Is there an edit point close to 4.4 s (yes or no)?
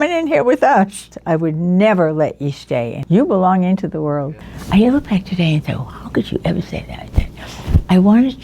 yes